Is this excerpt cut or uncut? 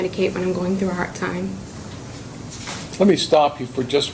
uncut